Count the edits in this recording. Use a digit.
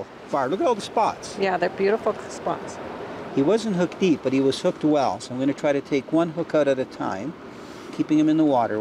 0